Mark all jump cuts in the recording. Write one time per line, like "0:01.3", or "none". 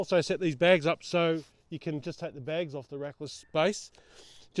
none